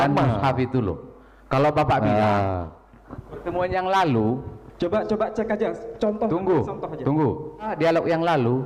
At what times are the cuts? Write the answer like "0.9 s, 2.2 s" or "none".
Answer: 7.7 s